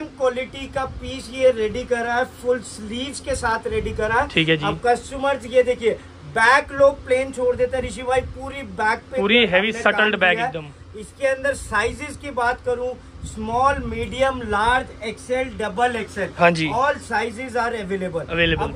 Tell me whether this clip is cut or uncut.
uncut